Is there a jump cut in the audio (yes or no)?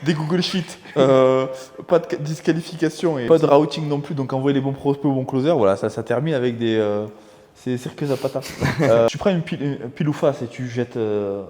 yes